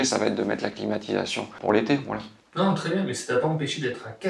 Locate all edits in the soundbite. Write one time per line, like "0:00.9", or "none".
0:01.5